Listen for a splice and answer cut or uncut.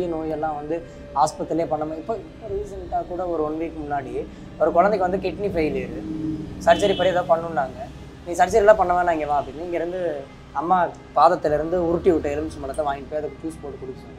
uncut